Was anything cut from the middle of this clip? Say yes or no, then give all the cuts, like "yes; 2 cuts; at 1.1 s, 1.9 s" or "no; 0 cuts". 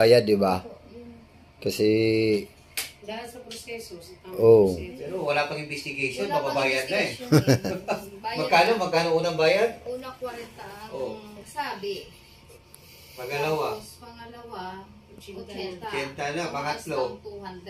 no; 0 cuts